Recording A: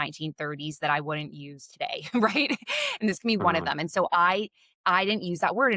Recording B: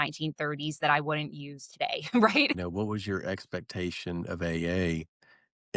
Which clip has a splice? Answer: B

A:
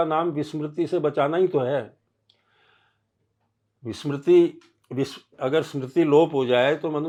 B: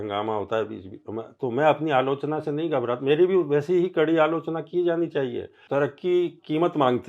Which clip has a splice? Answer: B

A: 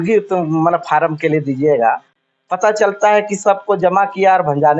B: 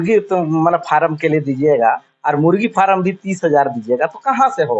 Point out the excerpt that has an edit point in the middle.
A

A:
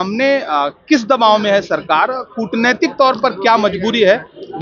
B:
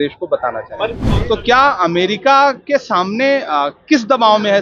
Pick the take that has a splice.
B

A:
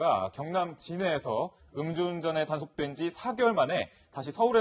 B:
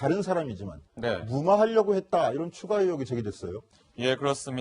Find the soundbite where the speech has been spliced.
B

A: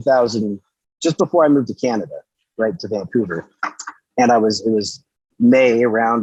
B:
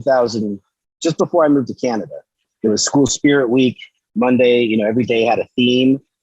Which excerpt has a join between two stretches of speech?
B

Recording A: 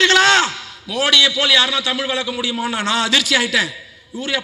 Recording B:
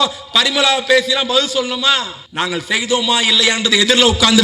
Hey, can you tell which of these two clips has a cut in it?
B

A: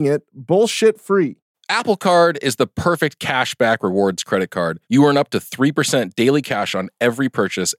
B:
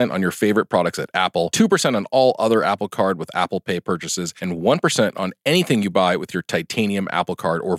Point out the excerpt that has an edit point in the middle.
A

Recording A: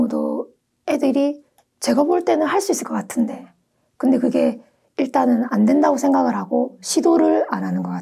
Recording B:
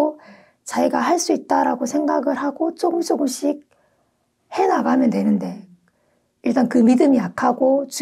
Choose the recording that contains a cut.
A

